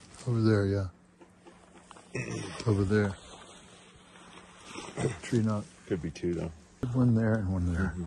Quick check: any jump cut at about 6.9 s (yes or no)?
yes